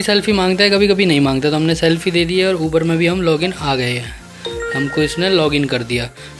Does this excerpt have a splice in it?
no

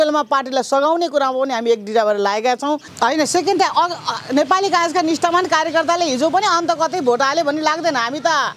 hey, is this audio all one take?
no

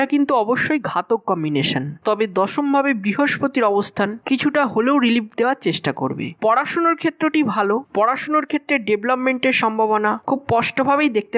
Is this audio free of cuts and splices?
no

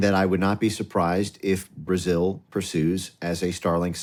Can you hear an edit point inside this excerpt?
no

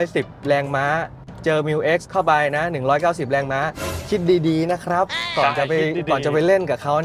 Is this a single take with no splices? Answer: yes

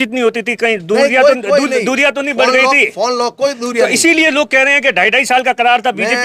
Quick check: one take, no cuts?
yes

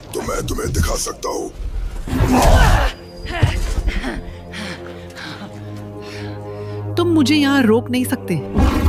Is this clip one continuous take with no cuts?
yes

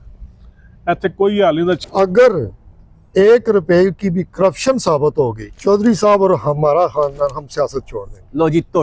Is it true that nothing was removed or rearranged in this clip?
no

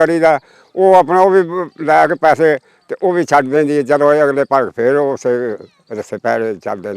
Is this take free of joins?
yes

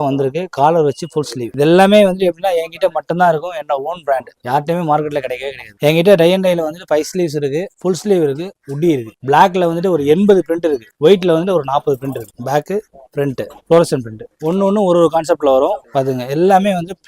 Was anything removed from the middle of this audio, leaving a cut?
yes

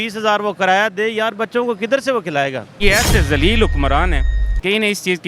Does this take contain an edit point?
yes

